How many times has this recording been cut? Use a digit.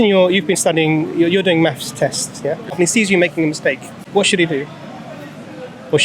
2